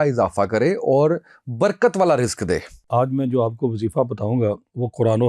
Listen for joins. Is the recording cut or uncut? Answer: cut